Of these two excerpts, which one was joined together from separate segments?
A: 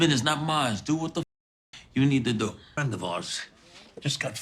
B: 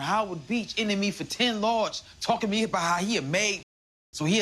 A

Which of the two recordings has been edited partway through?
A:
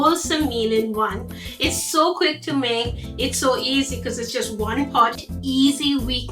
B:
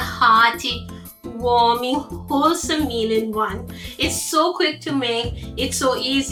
A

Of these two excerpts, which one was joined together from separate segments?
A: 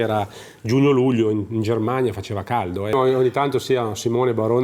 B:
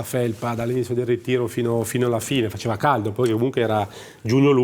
A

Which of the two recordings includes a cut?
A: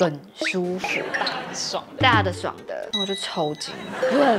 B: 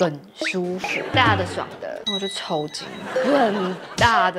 B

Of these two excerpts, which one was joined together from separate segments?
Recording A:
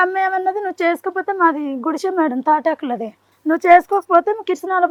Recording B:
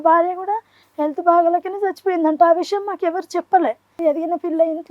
B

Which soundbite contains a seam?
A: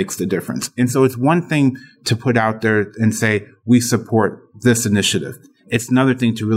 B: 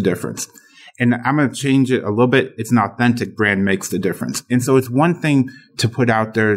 A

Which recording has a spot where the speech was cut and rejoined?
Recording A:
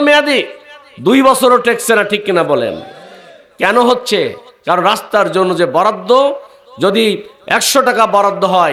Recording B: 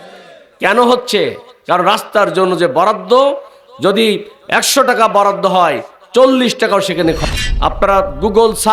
B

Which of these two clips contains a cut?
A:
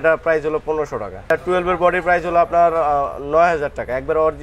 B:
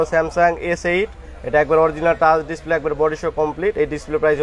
A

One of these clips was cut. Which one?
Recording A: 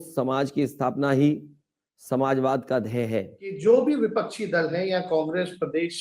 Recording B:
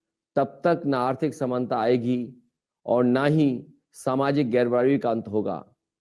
A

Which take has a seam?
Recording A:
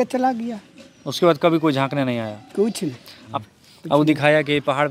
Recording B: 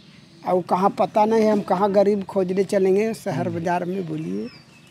A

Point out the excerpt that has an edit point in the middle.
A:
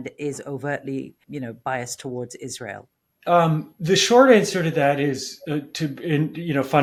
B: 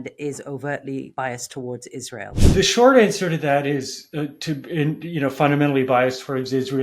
B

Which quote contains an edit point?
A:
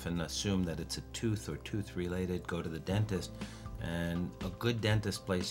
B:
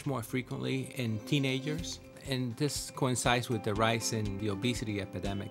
B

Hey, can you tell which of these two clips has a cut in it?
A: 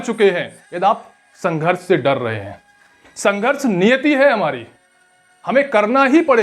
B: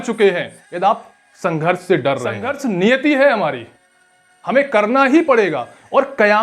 B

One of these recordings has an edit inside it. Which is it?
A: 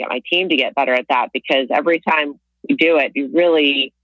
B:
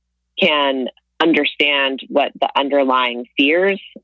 B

